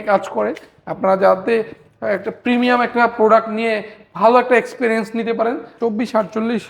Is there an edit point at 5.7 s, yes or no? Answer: yes